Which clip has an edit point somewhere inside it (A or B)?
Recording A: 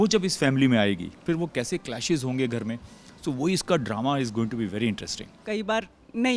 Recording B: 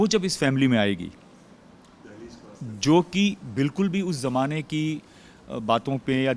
A